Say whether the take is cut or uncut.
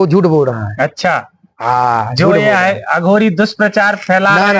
uncut